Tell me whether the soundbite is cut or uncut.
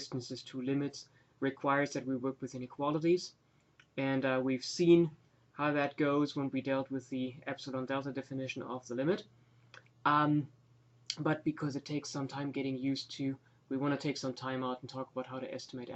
uncut